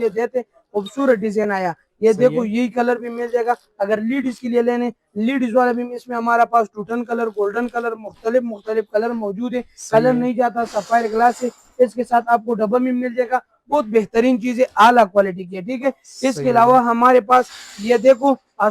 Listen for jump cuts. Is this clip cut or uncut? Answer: uncut